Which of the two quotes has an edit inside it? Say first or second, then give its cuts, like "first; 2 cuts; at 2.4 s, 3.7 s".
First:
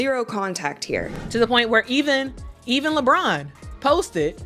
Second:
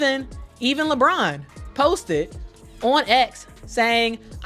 first; 1 cut; at 1.2 s